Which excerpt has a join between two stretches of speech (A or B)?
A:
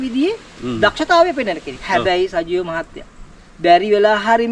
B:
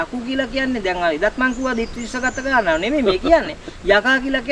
A